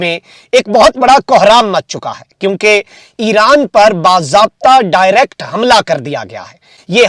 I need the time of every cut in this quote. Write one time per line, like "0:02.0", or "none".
none